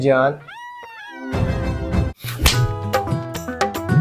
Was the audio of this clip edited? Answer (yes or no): yes